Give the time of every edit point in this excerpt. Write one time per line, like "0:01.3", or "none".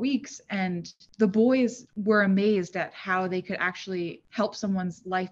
0:01.0
0:01.9
0:04.2